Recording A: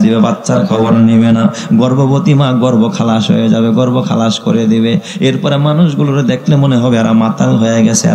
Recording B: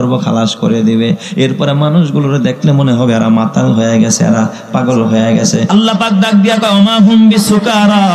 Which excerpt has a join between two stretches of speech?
B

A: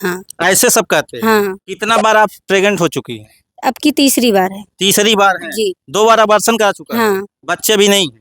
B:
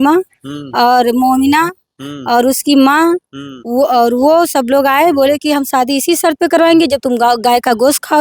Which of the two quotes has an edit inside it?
A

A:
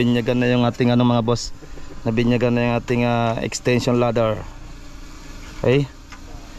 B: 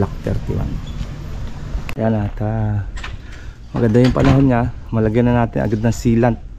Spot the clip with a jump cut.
B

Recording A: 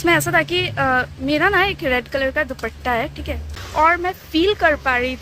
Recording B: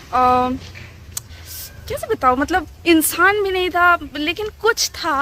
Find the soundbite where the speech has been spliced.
A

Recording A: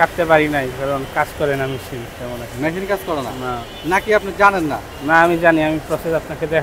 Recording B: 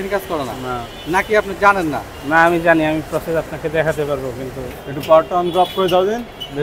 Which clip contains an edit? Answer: B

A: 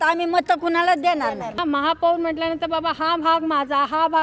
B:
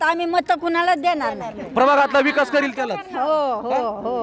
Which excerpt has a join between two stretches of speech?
A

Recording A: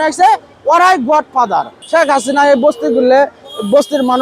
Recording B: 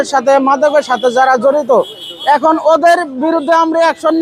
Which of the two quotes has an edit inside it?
A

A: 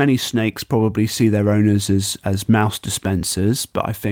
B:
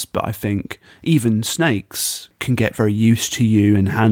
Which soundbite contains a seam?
B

